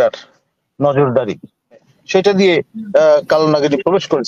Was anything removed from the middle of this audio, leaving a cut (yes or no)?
yes